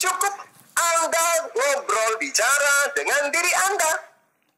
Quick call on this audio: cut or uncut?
uncut